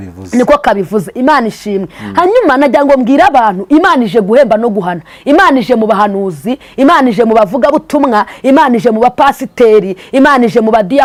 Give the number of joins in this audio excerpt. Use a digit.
0